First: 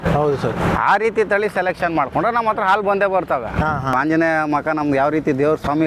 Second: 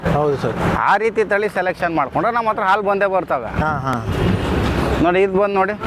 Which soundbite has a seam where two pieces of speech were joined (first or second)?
first